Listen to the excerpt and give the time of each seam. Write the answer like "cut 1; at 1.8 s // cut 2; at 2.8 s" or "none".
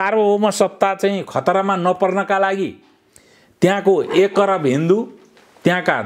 none